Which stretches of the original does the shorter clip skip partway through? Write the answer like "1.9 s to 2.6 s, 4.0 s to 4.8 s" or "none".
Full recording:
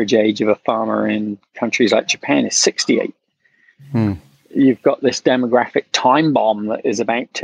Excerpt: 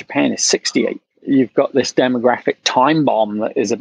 3.2 s to 4.4 s